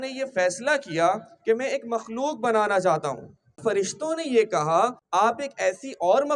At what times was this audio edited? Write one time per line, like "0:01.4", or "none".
0:03.3
0:05.0